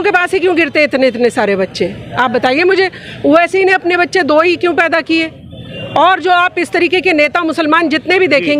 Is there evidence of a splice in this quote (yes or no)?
no